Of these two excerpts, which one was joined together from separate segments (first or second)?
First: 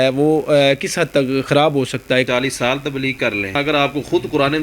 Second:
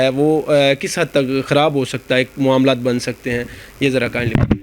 first